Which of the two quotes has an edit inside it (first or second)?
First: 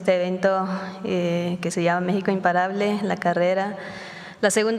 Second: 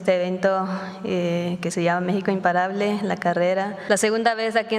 second